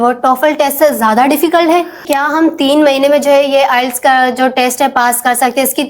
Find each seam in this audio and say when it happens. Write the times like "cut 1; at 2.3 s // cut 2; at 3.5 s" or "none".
cut 1; at 2.1 s